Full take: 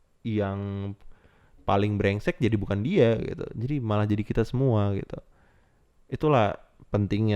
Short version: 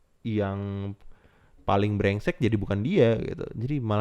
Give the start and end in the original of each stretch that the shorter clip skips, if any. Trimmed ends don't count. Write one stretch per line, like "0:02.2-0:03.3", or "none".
none